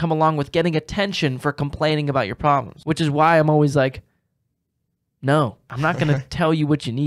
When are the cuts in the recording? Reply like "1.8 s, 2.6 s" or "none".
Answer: 2.7 s, 5.6 s